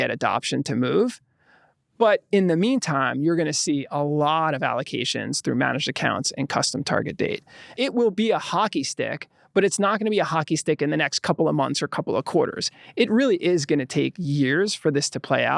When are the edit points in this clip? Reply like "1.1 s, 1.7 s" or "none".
7.7 s